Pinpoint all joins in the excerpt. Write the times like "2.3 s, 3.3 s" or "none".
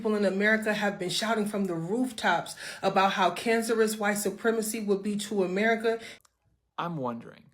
6.1 s